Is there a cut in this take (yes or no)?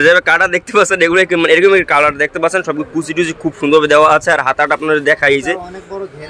no